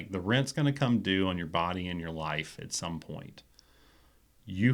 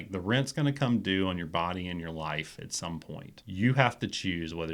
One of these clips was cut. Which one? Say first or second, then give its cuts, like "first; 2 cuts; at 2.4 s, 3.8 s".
second; 1 cut; at 3.3 s